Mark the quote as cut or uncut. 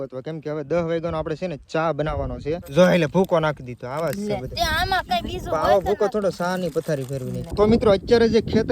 cut